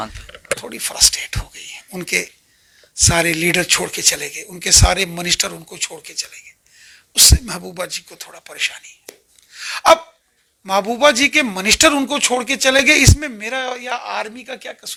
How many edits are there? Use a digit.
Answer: 0